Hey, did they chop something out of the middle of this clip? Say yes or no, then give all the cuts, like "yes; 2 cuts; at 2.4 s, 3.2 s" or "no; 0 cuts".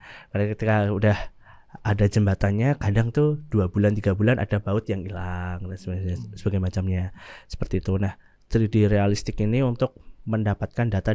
no; 0 cuts